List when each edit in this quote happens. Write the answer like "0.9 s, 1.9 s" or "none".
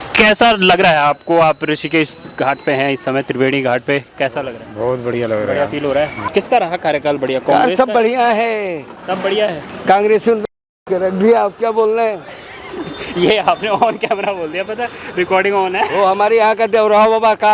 6.2 s